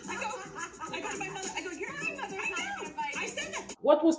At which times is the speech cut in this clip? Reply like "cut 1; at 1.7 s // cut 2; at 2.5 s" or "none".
none